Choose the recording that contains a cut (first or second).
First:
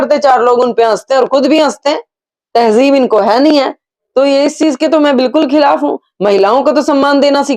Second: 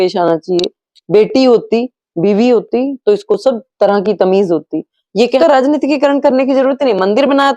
second